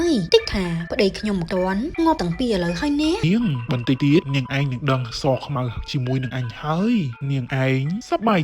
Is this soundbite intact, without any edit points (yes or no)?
no